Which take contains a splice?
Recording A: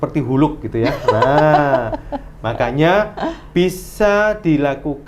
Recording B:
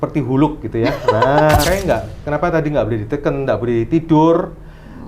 B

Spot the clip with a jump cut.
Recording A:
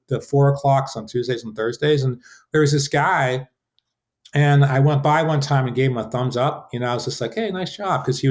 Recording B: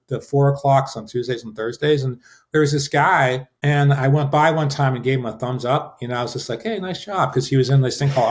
B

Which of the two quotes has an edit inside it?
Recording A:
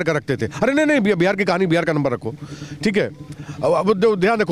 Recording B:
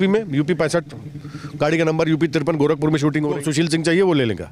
B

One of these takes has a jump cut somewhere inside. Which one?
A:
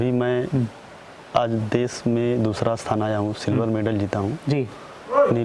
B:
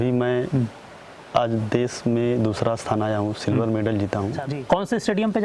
B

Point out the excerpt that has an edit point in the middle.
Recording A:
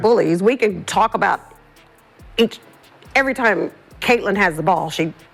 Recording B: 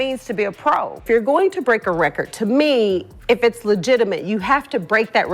B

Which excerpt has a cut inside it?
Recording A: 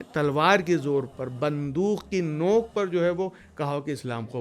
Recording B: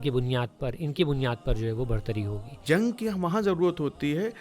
B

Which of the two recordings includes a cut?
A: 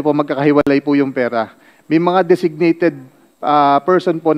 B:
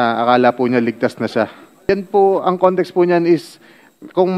B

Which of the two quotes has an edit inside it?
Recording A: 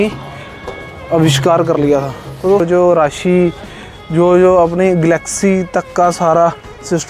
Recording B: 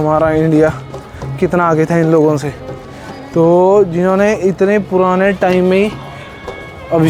A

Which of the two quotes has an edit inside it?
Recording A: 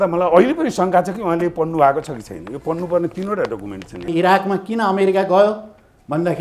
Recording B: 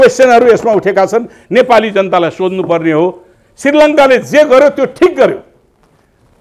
A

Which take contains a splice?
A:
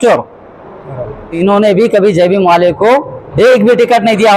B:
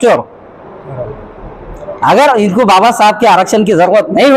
A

